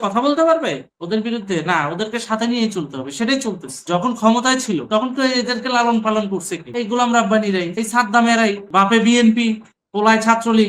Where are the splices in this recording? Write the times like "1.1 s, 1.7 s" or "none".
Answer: none